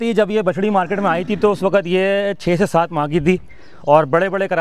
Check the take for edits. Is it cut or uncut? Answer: uncut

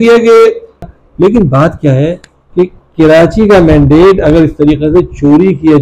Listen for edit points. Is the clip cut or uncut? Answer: cut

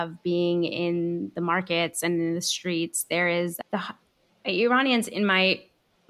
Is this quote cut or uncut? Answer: uncut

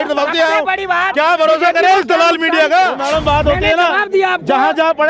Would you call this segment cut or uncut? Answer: cut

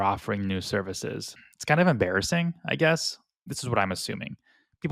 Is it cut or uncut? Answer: cut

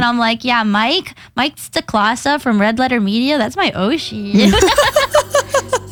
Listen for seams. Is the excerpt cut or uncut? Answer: uncut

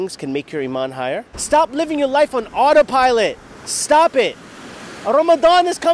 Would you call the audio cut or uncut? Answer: cut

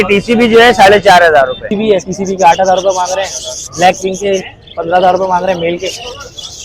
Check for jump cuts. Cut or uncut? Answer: cut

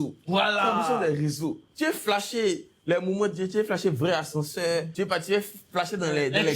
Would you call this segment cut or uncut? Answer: cut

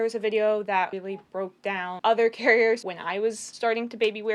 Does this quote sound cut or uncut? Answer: cut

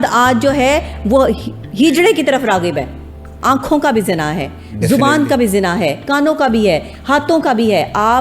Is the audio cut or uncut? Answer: cut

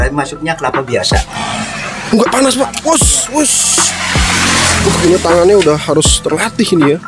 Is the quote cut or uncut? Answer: cut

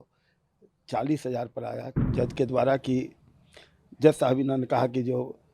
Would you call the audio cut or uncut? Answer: cut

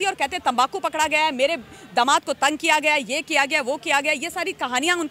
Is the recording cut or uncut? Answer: uncut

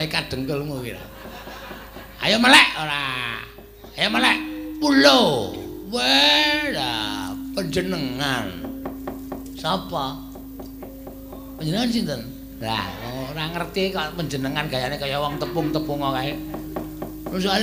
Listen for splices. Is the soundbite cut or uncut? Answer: uncut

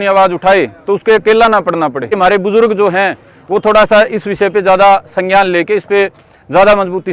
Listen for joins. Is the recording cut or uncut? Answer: cut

